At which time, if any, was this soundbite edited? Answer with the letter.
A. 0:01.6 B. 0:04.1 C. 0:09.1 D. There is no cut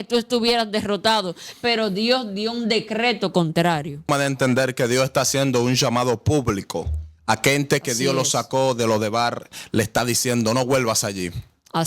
B